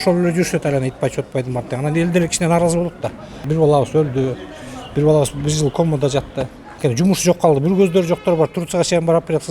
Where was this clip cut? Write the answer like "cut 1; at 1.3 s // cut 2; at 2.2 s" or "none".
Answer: cut 1; at 3.4 s // cut 2; at 6.8 s